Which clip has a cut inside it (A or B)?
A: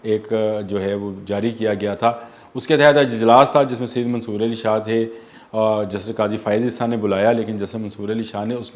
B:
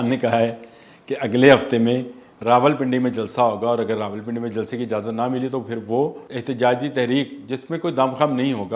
B